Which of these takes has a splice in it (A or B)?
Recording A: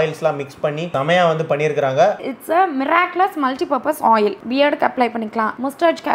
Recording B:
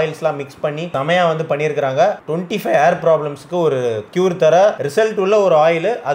A